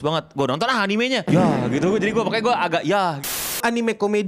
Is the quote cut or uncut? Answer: cut